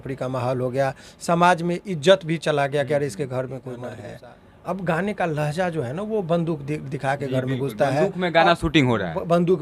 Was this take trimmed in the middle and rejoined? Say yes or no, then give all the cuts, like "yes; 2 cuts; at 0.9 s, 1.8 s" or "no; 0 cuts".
yes; 1 cut; at 4.0 s